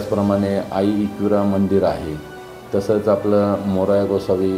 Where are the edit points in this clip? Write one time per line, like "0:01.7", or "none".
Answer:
none